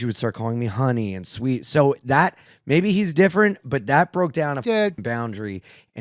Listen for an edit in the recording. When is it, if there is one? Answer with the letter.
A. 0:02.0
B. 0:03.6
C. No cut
C